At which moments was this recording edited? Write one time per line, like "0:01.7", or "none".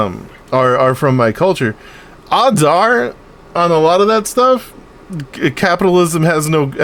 none